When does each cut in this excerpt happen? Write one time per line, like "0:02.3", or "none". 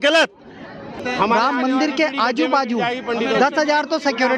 0:01.0